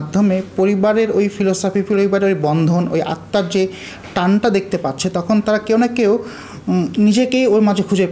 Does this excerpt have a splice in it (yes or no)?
no